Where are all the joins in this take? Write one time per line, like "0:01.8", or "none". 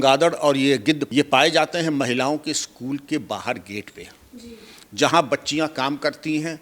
0:01.0